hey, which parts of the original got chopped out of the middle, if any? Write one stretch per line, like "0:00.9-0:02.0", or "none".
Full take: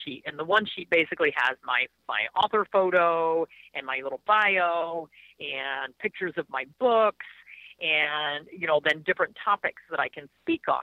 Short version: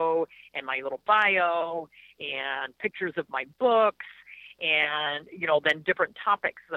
none